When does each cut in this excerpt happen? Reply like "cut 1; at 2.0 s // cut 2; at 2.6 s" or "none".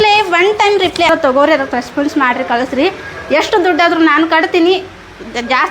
cut 1; at 1.1 s